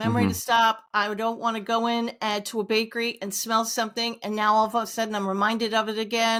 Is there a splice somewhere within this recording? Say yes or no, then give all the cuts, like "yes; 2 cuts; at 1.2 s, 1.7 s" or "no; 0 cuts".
no; 0 cuts